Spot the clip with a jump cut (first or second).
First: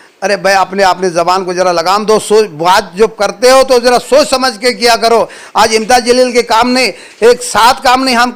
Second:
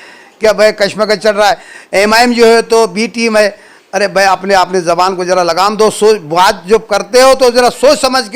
second